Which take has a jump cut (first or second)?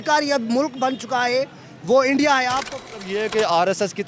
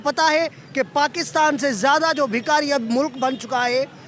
first